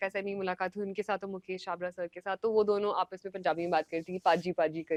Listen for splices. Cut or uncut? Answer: uncut